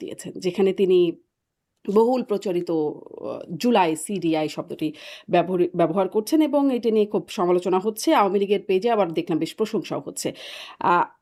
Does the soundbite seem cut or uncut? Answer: uncut